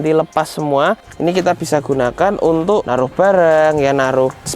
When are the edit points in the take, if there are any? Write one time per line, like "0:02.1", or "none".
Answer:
0:01.1
0:02.9